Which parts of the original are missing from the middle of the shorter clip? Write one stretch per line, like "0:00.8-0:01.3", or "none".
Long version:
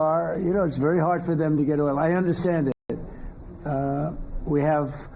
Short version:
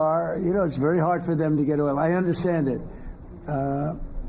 0:02.7-0:02.9